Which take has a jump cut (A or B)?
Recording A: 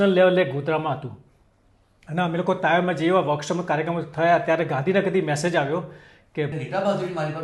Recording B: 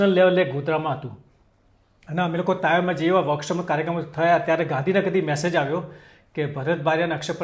A